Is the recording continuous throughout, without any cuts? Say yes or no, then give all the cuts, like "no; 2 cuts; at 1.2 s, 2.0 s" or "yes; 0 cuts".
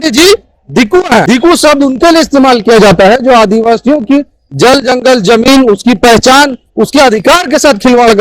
no; 1 cut; at 1.2 s